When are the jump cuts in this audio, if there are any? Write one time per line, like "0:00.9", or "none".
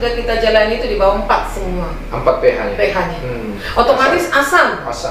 0:03.5